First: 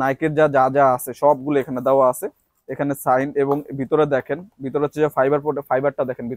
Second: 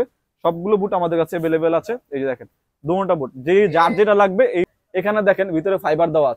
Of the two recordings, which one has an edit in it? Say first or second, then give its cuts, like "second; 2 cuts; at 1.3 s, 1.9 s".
second; 1 cut; at 4.8 s